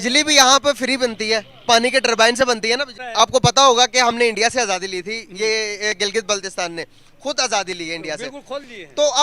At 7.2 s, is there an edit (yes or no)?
no